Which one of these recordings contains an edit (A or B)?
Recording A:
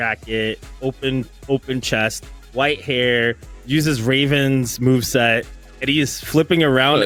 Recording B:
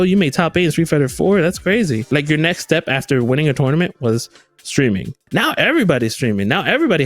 B